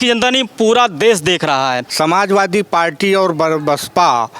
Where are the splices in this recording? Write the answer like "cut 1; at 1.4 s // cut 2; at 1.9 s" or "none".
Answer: cut 1; at 1.8 s